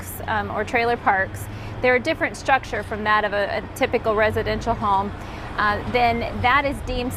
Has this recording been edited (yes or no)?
no